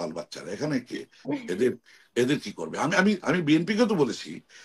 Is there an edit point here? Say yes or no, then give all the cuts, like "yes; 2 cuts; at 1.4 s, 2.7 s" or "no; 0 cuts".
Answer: no; 0 cuts